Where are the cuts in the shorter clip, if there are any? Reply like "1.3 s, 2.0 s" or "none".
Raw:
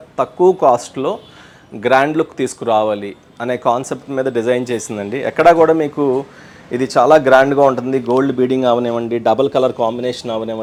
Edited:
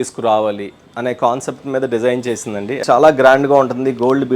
2.8 s